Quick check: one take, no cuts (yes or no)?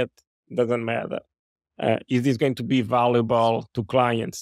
yes